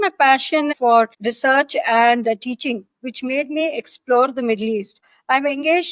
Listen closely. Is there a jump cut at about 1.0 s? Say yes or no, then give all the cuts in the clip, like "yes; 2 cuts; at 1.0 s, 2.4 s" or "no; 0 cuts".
yes; 2 cuts; at 1.0 s, 4.9 s